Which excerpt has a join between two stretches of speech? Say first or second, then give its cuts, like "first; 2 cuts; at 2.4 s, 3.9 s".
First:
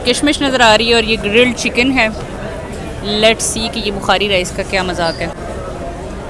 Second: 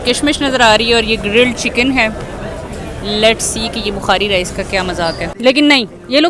second; 1 cut; at 5.3 s